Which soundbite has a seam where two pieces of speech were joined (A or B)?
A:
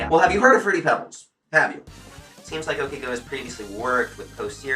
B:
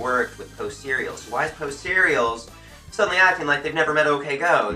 A